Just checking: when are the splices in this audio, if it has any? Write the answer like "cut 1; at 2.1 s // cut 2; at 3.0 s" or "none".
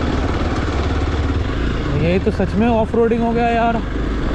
none